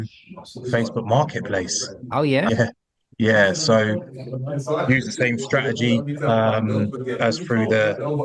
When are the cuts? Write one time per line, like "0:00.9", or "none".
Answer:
0:02.5